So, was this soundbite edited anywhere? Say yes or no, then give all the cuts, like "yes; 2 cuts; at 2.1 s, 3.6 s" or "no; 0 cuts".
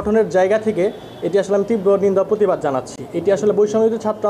no; 0 cuts